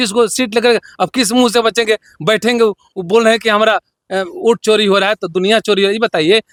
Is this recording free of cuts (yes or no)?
yes